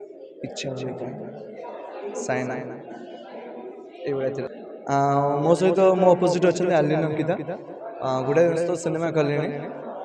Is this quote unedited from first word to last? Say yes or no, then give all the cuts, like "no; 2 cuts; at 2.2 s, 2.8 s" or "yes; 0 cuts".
no; 1 cut; at 4.5 s